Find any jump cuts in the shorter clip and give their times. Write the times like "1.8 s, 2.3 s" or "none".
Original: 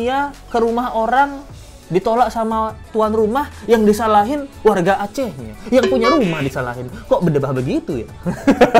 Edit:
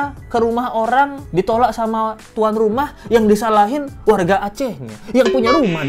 1.2 s